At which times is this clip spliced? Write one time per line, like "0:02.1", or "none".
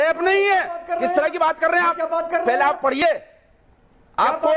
none